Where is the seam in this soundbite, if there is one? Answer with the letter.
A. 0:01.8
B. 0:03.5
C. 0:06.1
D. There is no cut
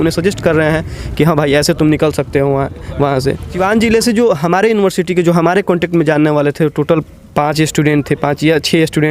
B